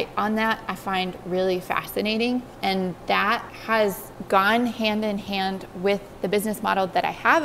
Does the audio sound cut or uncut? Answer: uncut